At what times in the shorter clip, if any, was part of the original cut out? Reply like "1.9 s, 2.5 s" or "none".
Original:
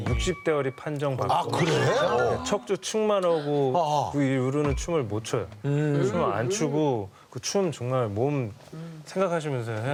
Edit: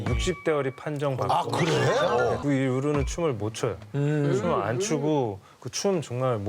2.4 s

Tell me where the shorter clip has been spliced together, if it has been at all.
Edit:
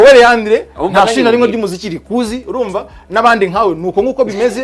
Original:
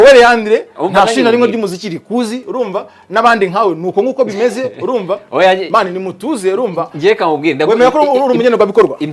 none

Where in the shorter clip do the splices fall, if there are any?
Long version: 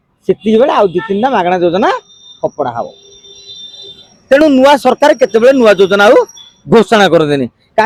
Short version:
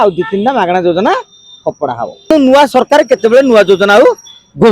2.3 s

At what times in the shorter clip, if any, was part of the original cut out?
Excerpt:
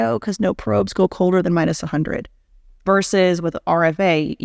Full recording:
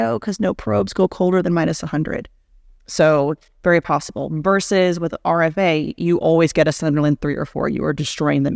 2.8 s

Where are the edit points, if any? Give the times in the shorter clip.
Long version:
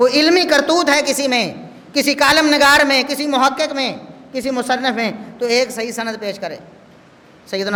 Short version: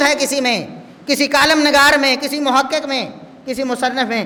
none

